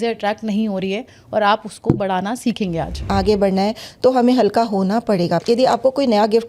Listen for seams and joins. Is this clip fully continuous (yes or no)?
no